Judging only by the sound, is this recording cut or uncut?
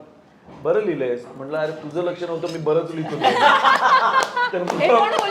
uncut